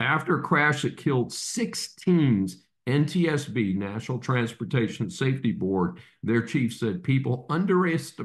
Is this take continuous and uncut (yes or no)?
yes